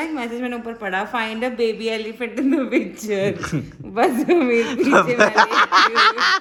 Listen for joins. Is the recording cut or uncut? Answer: uncut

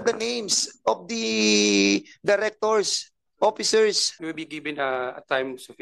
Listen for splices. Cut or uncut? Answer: cut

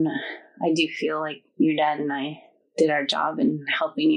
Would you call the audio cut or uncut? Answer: uncut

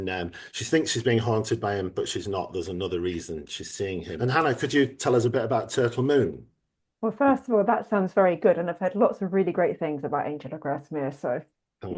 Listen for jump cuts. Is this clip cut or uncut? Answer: uncut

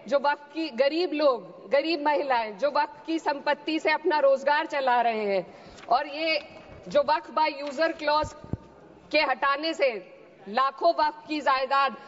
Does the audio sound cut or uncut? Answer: uncut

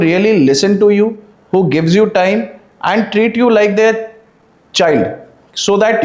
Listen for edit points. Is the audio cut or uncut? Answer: uncut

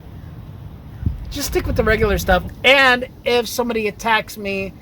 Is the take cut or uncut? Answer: cut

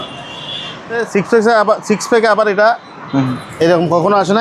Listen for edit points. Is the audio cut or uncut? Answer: cut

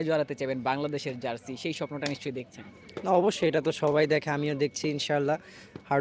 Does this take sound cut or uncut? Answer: uncut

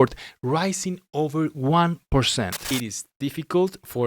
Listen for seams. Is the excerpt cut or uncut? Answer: cut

